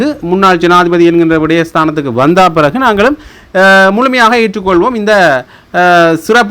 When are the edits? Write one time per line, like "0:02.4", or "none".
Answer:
none